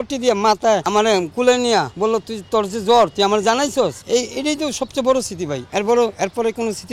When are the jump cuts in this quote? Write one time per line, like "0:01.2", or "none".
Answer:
0:00.8
0:01.9
0:04.0
0:05.6